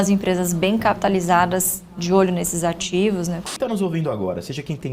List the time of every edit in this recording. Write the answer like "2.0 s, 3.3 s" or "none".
3.5 s